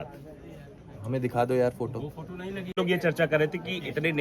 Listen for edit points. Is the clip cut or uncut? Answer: cut